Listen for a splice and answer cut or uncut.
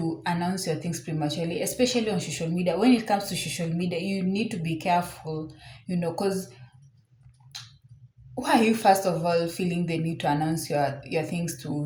uncut